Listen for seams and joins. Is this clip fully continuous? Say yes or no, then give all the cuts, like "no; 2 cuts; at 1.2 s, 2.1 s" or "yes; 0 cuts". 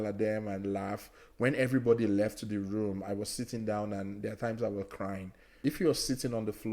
no; 1 cut; at 5.4 s